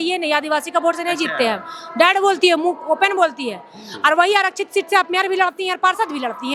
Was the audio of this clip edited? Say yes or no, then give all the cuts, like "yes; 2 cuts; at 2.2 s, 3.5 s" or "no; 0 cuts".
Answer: no; 0 cuts